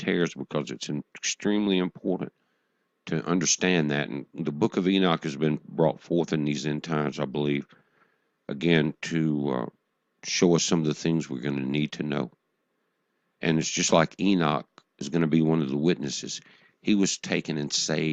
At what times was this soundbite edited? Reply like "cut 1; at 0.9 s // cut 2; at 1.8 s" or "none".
none